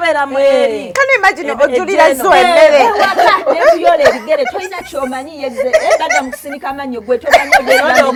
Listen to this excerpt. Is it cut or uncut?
uncut